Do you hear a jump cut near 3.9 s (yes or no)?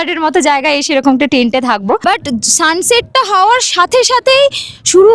no